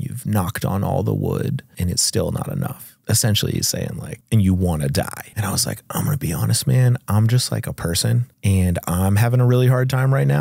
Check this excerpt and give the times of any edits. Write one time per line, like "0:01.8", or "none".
0:01.7
0:02.9
0:04.1
0:05.2
0:08.3